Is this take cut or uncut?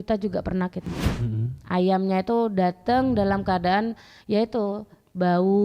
cut